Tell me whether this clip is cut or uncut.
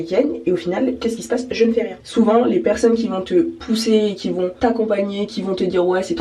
cut